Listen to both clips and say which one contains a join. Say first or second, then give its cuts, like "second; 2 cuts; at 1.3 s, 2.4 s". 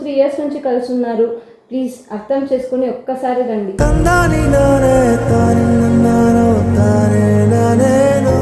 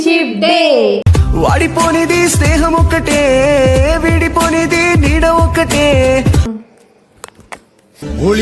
second; 1 cut; at 6.5 s